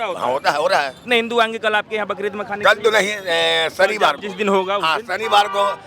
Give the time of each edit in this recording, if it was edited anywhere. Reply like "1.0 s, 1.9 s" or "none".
1.0 s

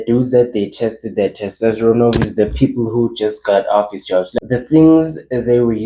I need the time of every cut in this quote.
4.3 s

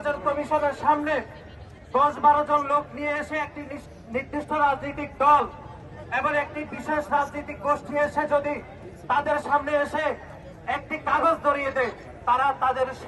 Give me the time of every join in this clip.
none

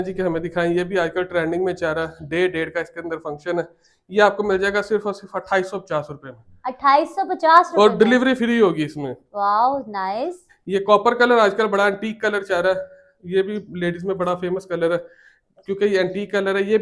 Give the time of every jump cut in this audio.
10.5 s

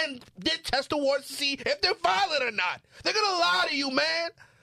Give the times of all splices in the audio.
none

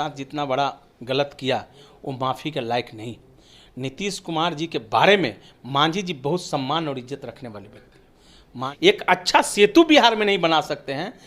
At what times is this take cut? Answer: 8.6 s

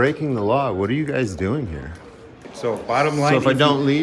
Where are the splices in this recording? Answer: 2.4 s

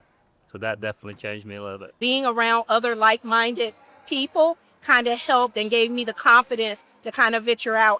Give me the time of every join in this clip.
2.0 s

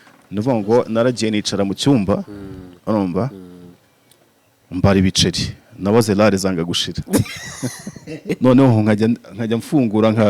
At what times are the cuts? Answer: 8.2 s

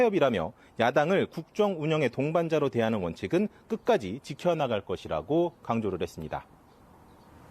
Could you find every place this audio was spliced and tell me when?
4.3 s

